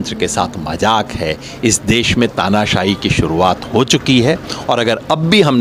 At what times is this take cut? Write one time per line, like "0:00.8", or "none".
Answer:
none